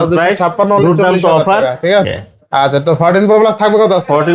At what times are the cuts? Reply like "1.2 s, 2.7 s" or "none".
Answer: 2.0 s